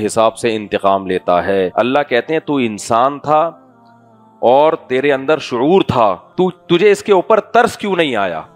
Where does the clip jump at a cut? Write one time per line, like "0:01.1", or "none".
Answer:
0:01.7
0:06.2